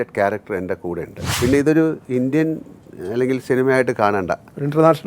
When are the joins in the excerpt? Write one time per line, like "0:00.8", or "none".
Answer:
0:01.3